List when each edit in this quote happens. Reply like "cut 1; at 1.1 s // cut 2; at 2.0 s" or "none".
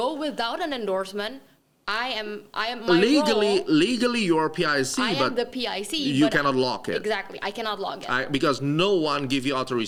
none